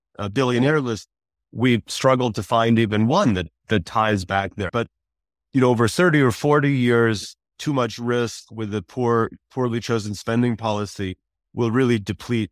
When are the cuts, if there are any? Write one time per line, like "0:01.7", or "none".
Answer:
0:04.7
0:07.5